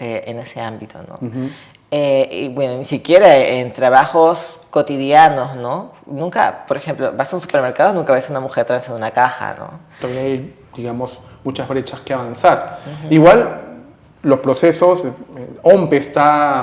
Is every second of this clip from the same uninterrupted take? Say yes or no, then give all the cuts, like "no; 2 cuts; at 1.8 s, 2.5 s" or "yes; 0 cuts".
yes; 0 cuts